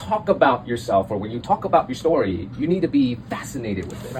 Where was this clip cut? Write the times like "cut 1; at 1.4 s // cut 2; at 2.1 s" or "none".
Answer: none